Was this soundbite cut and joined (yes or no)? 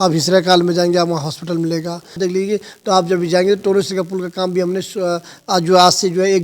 yes